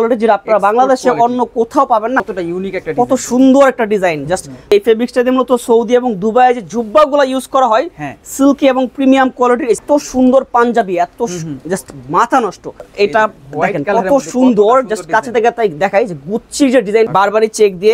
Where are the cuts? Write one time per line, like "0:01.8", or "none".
0:02.3
0:04.7
0:09.8
0:12.9
0:17.1